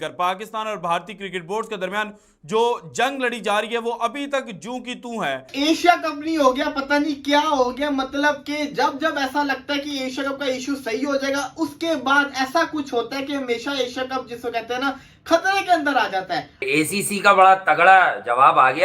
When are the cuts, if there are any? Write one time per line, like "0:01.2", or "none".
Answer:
0:05.4
0:16.5